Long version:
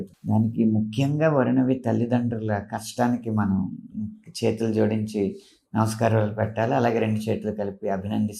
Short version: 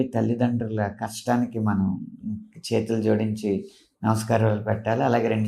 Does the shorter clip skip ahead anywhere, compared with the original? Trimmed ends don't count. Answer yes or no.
no